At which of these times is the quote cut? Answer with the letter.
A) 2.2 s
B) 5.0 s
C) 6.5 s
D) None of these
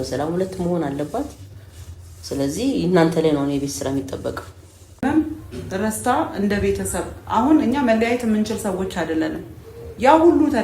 B